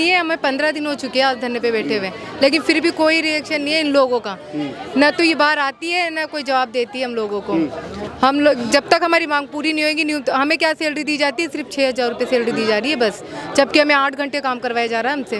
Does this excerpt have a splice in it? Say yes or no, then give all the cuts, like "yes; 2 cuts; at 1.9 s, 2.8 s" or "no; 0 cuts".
no; 0 cuts